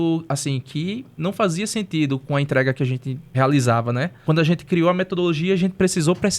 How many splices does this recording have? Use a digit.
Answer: 3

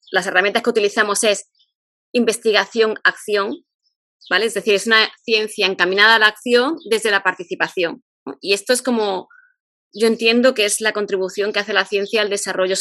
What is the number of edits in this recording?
0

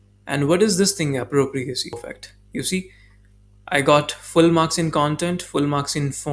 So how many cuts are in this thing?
1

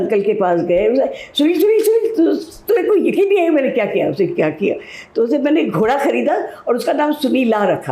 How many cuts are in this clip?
0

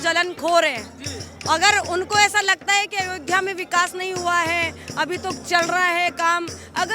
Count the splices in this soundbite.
0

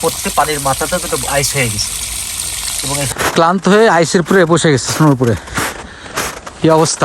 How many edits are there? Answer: 1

